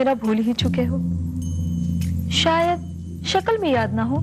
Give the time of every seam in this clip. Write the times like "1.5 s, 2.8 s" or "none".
none